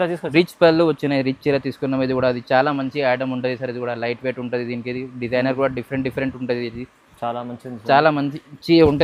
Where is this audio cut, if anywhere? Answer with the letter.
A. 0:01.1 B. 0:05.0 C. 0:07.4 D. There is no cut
D